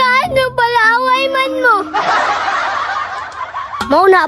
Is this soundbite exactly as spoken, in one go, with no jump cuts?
yes; 0 cuts

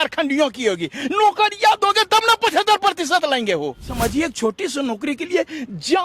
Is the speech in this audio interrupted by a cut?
yes; 1 cut; at 3.9 s

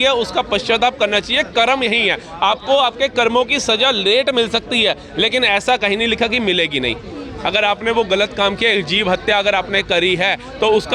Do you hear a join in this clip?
no; 0 cuts

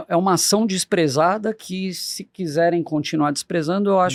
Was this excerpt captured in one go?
yes; 0 cuts

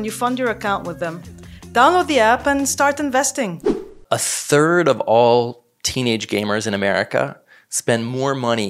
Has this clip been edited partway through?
yes; 1 cut; at 4.0 s

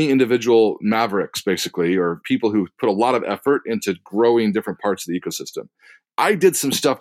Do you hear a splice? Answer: yes; 2 cuts; at 2.2 s, 5.9 s

